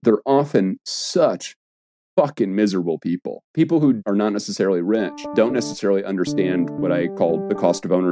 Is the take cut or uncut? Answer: cut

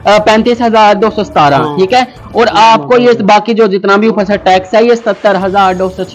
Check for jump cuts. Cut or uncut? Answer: uncut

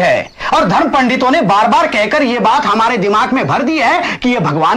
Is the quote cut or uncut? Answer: uncut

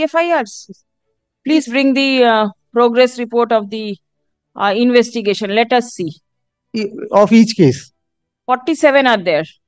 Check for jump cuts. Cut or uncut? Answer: uncut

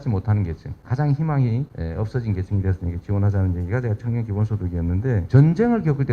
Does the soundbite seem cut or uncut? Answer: cut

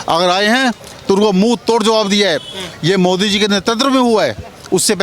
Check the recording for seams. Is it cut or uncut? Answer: cut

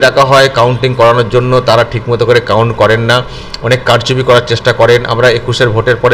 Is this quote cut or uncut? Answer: uncut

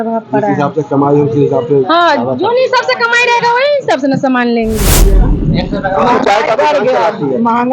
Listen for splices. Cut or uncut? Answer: cut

